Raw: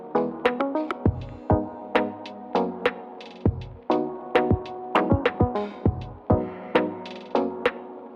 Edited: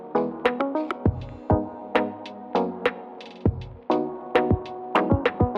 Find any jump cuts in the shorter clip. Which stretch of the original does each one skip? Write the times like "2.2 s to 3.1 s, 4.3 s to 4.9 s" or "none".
none